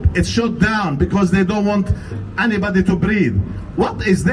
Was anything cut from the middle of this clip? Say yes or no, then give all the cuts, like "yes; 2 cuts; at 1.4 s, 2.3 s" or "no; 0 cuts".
no; 0 cuts